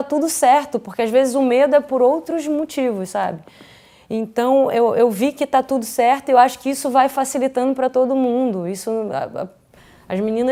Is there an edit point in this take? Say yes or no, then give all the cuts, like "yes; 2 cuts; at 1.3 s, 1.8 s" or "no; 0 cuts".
no; 0 cuts